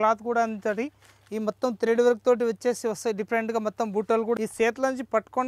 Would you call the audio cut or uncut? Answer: cut